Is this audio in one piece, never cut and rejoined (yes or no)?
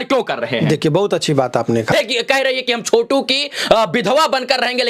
no